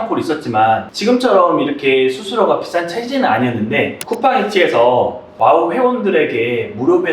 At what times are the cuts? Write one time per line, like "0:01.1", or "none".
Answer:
0:04.0